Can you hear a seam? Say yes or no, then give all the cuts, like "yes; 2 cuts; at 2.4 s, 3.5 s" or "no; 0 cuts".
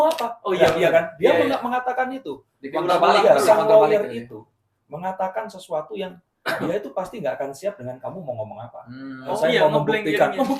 yes; 1 cut; at 9.4 s